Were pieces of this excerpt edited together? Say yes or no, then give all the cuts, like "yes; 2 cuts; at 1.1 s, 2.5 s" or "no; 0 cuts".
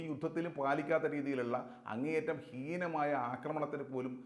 no; 0 cuts